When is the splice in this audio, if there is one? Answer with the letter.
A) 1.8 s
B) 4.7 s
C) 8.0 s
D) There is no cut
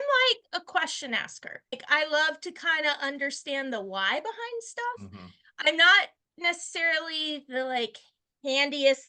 A